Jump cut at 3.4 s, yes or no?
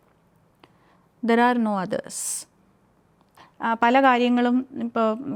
yes